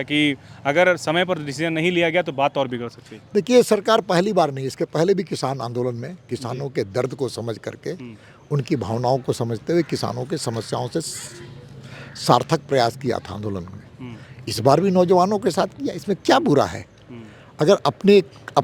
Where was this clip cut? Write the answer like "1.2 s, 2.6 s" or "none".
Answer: none